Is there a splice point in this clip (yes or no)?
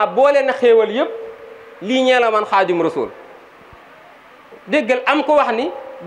no